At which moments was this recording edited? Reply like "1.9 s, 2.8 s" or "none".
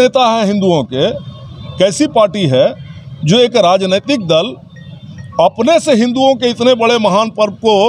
none